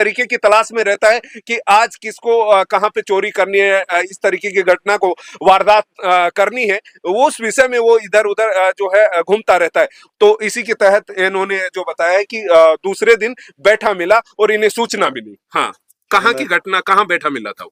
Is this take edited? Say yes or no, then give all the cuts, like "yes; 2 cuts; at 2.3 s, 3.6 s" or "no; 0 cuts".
no; 0 cuts